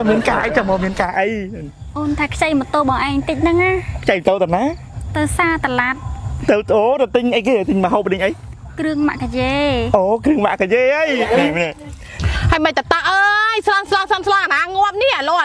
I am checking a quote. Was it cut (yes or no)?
yes